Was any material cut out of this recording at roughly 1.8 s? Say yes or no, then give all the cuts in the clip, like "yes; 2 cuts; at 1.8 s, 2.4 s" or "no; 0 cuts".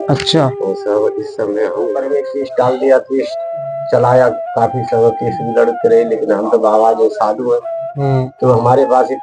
yes; 1 cut; at 1.8 s